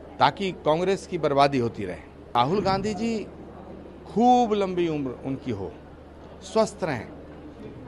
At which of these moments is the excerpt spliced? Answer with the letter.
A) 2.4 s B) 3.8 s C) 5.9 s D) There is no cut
A